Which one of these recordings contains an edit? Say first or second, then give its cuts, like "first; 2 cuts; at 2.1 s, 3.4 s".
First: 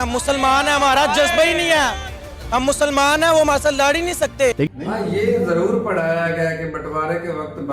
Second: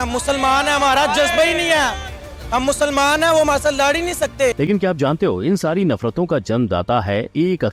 first; 1 cut; at 4.7 s